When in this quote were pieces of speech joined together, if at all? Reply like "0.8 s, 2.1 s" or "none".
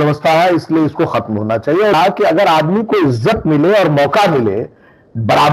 1.9 s